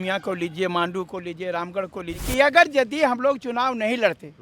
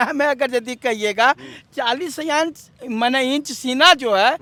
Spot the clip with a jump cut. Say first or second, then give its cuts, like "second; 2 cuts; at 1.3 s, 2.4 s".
first; 1 cut; at 2.2 s